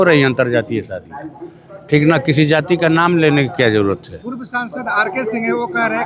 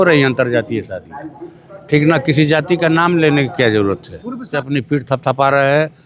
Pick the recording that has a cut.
second; 1 cut; at 4.5 s

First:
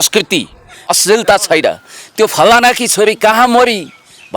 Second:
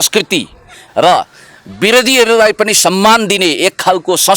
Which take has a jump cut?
first; 1 cut; at 0.9 s

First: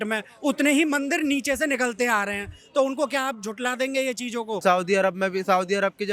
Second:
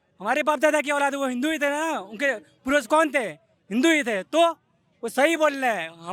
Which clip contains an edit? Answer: first; 1 cut; at 4.6 s

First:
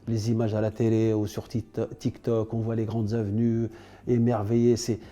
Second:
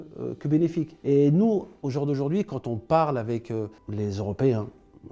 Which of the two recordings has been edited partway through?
second; 3 cuts; at 0.9 s, 1.8 s, 3.8 s

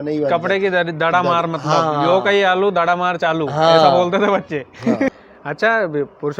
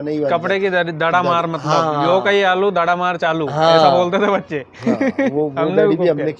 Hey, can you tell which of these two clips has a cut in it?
first; 1 cut; at 5.1 s

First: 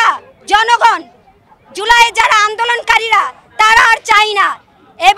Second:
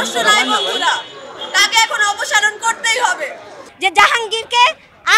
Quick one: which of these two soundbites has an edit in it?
second; 1 cut; at 3.6 s

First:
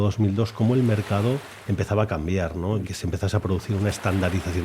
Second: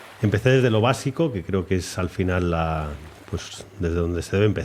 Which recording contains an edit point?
first; 1 cut; at 2.9 s

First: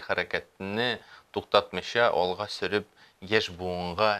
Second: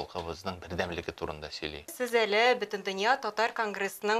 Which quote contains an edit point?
second; 1 cut; at 1.9 s

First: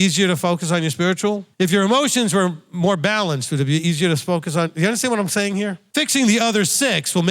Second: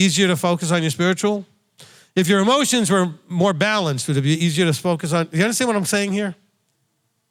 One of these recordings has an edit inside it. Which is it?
first; 2 cuts; at 1.5 s, 5.8 s

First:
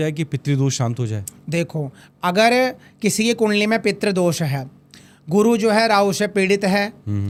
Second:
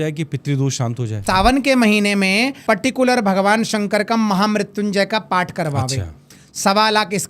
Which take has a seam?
second; 2 cuts; at 1.2 s, 2.6 s

